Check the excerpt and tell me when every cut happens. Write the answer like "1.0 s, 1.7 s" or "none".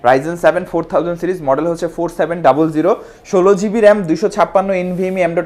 none